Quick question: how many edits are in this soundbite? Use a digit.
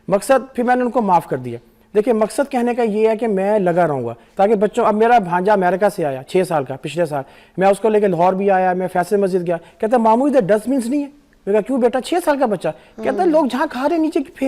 1